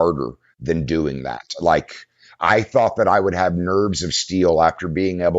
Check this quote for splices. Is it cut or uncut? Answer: cut